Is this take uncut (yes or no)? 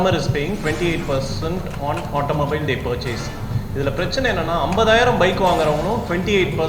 yes